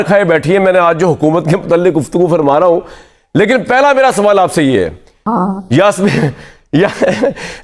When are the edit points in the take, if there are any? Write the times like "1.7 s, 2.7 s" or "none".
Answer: none